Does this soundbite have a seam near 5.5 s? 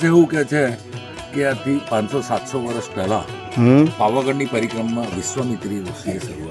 no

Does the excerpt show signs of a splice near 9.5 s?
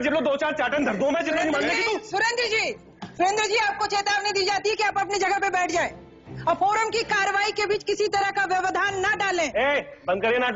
yes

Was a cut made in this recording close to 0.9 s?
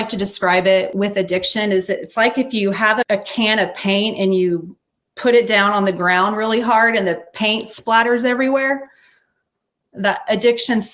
yes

